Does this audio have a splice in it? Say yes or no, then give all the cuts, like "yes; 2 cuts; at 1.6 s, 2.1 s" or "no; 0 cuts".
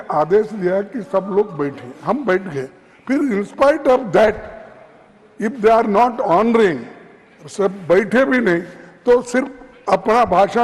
no; 0 cuts